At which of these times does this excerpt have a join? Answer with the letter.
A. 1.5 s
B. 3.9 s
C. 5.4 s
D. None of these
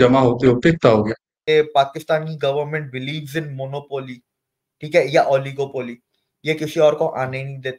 A